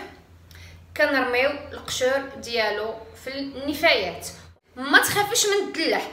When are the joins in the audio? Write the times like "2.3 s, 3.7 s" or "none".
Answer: 4.5 s